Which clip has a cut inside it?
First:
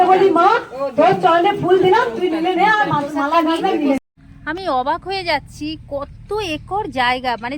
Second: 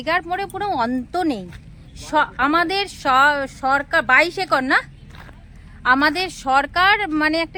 first; 1 cut; at 4.0 s

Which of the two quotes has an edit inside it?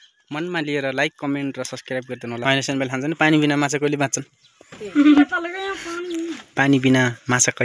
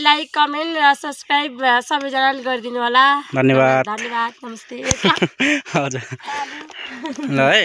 first; 1 cut; at 2.3 s

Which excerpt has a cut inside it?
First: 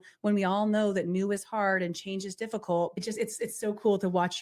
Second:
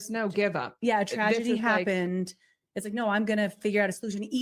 first; 1 cut; at 2.9 s

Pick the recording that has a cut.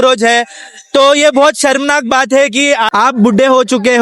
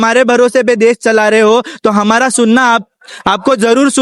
first; 1 cut; at 2.9 s

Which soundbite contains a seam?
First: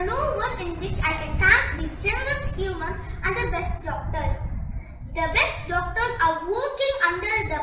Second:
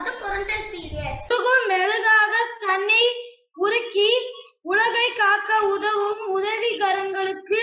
second; 1 cut; at 1.3 s

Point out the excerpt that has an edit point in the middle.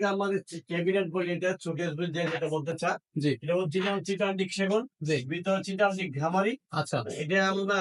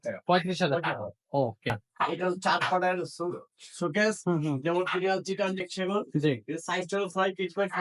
second; 1 cut; at 1.9 s

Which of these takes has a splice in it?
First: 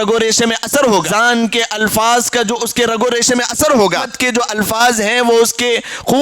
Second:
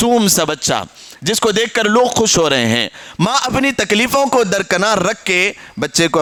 first; 2 cuts; at 1.1 s, 4.4 s

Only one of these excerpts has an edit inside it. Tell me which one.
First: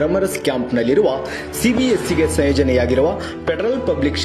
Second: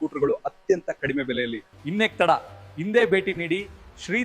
second; 1 cut; at 1.7 s

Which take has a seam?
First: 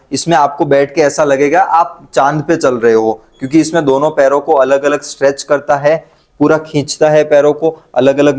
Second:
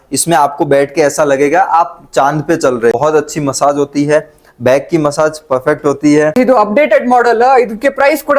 second; 2 cuts; at 2.9 s, 6.4 s

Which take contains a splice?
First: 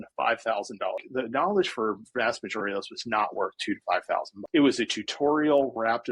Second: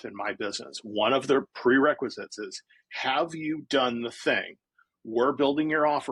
first; 2 cuts; at 1.0 s, 4.4 s

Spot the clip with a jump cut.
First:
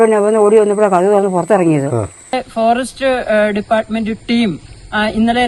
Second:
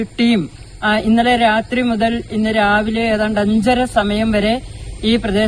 first; 1 cut; at 2.3 s

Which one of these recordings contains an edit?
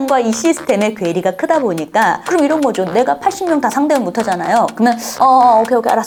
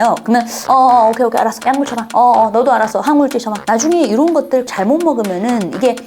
second; 2 cuts; at 3.5 s, 4.7 s

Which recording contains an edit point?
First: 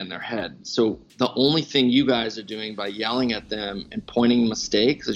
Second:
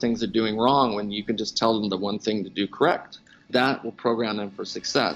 second; 1 cut; at 3.5 s

